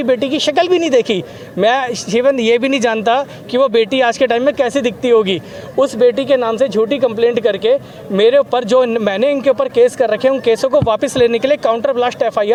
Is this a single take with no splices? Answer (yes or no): yes